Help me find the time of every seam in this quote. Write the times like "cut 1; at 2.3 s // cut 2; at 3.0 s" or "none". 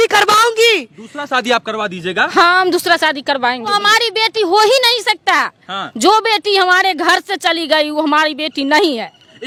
none

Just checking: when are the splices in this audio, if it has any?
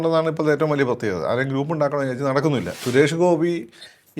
cut 1; at 2.8 s

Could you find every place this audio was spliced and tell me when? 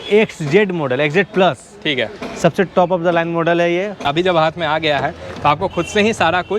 cut 1; at 4.0 s

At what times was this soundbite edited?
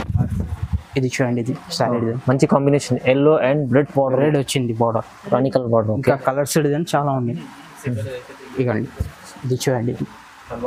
none

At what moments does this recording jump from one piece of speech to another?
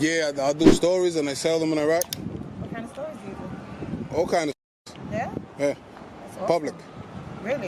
none

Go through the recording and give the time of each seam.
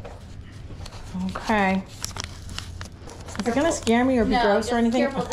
none

